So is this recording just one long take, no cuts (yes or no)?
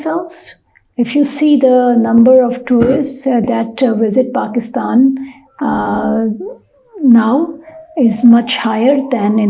yes